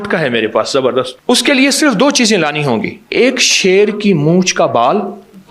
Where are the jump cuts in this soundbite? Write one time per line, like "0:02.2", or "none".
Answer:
0:01.1
0:03.0